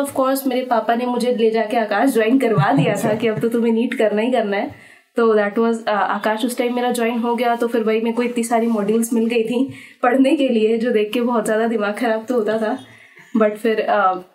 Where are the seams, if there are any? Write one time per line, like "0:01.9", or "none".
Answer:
none